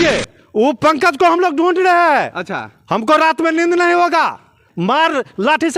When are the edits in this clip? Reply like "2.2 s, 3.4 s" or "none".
none